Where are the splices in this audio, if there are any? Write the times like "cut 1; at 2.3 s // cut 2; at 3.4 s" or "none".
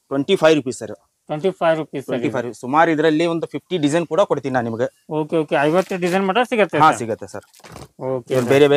none